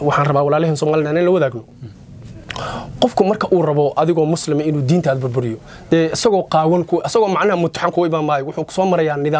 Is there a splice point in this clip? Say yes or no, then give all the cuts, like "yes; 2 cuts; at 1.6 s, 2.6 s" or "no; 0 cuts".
no; 0 cuts